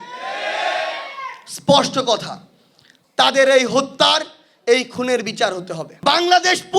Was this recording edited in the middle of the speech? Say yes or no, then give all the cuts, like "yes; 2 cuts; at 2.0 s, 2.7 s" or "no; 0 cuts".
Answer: yes; 1 cut; at 5.8 s